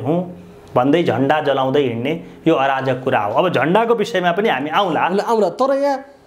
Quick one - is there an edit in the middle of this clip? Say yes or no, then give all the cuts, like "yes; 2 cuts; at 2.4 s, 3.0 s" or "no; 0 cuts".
no; 0 cuts